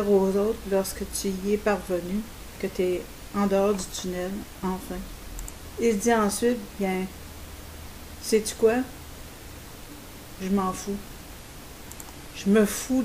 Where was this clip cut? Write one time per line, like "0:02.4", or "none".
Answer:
none